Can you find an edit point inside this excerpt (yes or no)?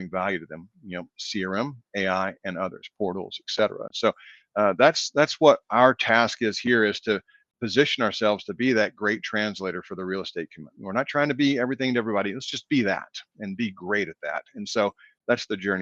no